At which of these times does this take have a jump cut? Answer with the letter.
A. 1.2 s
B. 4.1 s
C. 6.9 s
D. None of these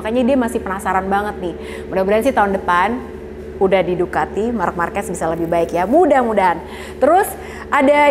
D